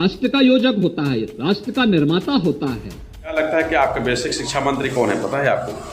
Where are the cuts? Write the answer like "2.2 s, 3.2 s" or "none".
3.3 s